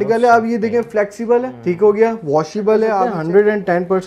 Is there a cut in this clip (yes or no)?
yes